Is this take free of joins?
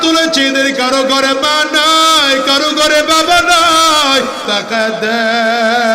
no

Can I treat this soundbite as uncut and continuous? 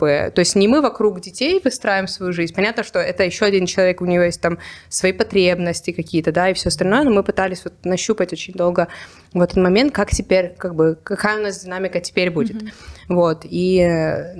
yes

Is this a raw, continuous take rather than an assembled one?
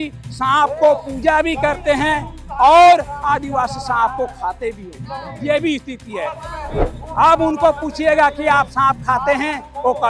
yes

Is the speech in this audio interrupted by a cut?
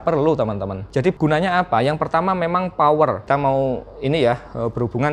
yes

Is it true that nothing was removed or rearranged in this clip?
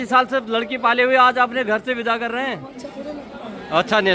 yes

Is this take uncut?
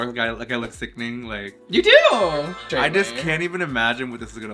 no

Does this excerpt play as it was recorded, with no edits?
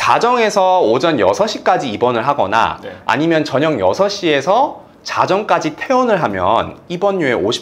yes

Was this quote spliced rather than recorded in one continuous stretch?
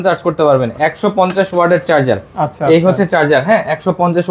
no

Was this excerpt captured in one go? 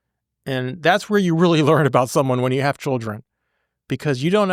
yes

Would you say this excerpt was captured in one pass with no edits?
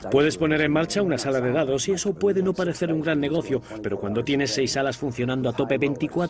no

